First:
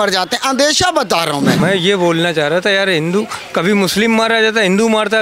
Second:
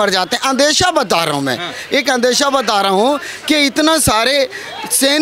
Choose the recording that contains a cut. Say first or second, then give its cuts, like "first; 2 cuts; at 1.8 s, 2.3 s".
first; 1 cut; at 1.6 s